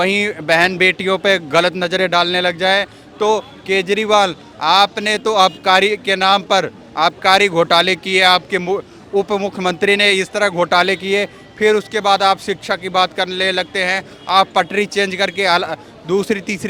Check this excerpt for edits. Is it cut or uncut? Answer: uncut